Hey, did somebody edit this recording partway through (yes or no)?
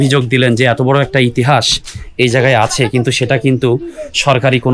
no